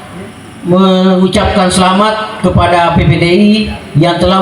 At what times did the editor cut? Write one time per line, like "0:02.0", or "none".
none